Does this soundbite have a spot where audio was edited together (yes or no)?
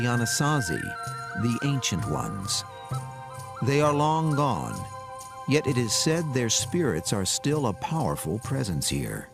yes